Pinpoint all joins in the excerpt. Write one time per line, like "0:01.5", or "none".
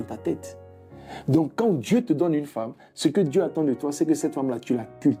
none